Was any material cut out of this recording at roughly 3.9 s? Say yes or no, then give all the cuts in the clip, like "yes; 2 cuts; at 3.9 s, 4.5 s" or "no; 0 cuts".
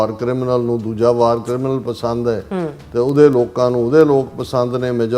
no; 0 cuts